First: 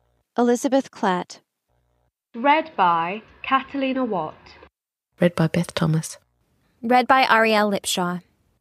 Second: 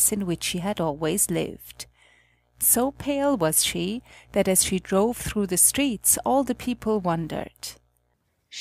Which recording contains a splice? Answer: first; 1 cut; at 4.4 s

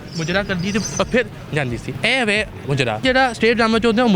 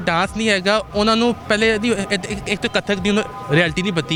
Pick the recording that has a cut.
first; 2 cuts; at 1.9 s, 3.0 s

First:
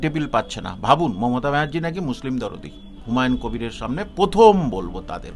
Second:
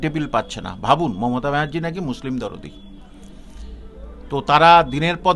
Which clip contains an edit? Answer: first; 1 cut; at 3.0 s

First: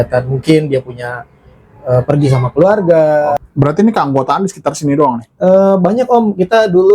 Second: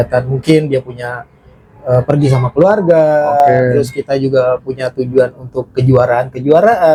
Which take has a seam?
first; 1 cut; at 3.3 s

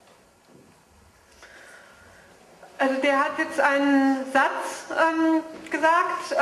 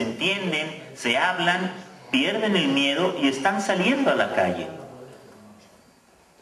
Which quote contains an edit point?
second; 1 cut; at 2.5 s

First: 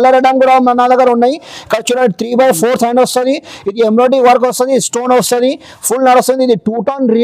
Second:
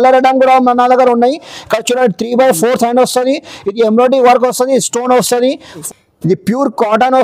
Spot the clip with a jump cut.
second; 1 cut; at 5.8 s

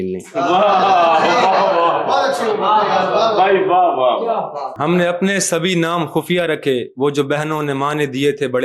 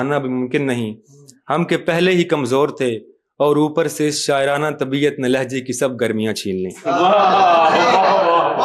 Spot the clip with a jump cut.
first; 1 cut; at 4.7 s

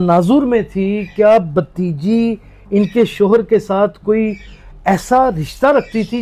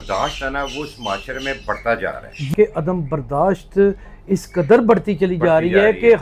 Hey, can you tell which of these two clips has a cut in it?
second; 1 cut; at 2.5 s

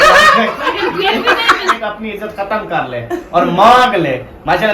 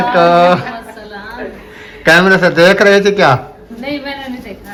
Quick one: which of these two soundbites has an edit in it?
first; 1 cut; at 1.7 s

